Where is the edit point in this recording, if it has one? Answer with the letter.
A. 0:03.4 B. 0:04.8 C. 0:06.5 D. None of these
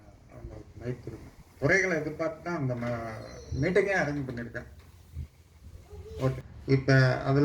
C